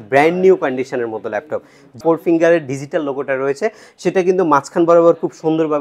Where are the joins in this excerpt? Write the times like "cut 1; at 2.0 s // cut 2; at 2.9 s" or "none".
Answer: cut 1; at 1.9 s